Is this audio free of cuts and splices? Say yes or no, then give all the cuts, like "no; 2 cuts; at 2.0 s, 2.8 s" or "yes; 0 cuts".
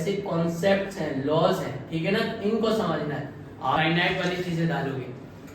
no; 1 cut; at 3.8 s